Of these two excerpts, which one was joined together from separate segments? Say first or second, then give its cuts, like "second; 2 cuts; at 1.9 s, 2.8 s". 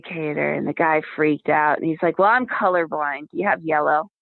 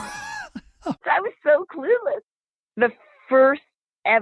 second; 2 cuts; at 1.0 s, 2.3 s